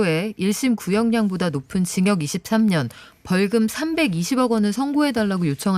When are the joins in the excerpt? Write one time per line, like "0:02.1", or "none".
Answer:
none